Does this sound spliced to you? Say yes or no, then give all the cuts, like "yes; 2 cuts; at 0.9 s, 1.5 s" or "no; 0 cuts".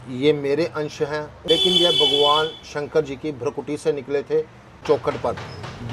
yes; 2 cuts; at 1.3 s, 4.8 s